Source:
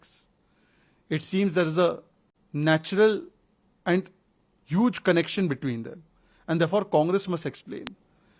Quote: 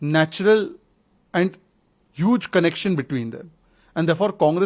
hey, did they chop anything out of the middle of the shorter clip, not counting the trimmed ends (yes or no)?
no